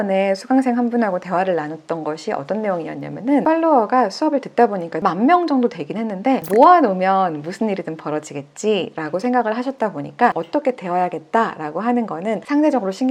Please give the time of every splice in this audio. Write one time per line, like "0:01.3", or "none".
0:03.4
0:05.0
0:10.4